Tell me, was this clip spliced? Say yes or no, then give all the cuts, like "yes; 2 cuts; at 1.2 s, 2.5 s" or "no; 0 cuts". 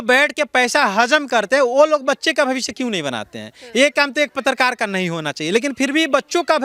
no; 0 cuts